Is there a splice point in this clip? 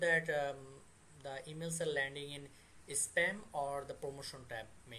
no; 0 cuts

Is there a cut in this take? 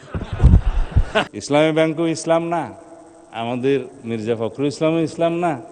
yes; 1 cut; at 1.3 s

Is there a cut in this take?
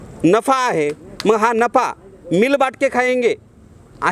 no; 0 cuts

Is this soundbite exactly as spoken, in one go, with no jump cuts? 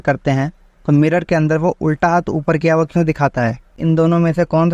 no; 1 cut; at 3.7 s

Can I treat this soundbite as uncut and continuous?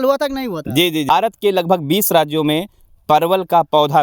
no; 1 cut; at 1.1 s

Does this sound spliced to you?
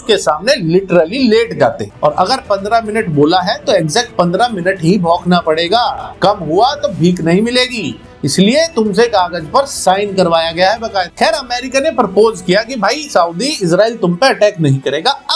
yes; 2 cuts; at 1.9 s, 11.1 s

